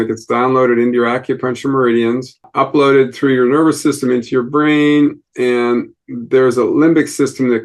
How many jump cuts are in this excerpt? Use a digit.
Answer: 1